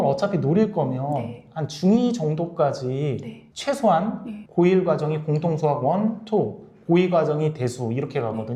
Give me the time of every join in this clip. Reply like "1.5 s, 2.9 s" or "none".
none